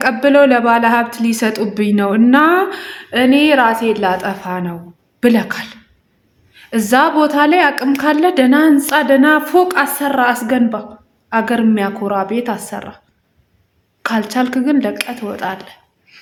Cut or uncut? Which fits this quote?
uncut